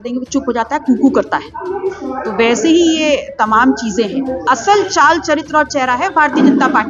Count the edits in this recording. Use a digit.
1